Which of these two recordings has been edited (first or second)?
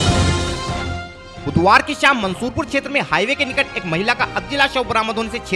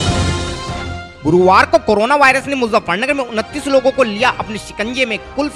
second